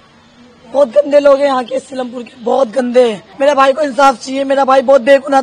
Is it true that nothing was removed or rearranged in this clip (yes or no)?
no